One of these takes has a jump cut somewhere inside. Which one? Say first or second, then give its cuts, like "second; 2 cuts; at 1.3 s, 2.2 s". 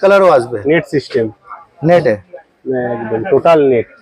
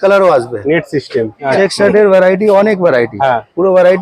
second; 1 cut; at 1.4 s